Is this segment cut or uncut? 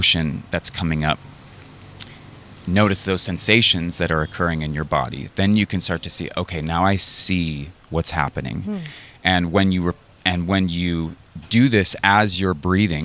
uncut